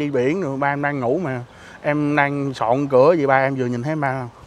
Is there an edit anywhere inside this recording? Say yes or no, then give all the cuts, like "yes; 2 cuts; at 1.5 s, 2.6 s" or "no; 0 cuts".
no; 0 cuts